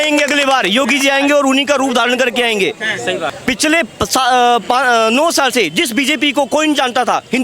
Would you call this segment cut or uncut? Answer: cut